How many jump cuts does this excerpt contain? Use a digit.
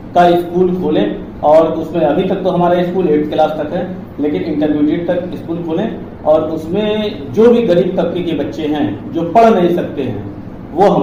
0